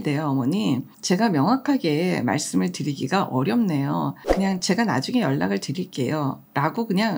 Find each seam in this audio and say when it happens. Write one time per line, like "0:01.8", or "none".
0:00.9
0:04.2

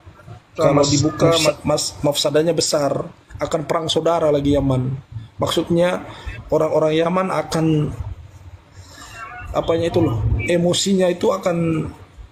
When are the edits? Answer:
0:01.5

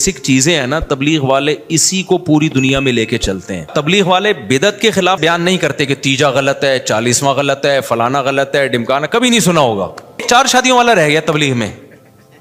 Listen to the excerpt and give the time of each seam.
0:03.7
0:05.2
0:10.2

